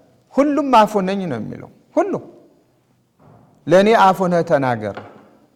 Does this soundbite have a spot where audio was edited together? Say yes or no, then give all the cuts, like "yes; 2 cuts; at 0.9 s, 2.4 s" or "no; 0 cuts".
no; 0 cuts